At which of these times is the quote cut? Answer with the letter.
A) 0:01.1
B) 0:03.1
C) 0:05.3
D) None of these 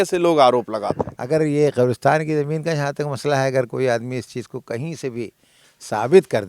A